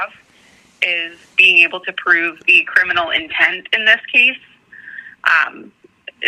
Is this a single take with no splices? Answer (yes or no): yes